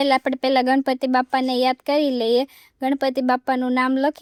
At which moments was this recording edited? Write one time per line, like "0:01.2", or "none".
none